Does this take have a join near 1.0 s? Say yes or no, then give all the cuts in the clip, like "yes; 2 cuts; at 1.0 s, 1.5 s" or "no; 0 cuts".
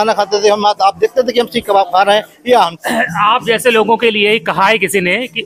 no; 1 cut; at 2.8 s